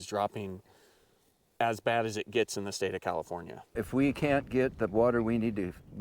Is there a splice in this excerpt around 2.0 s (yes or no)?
no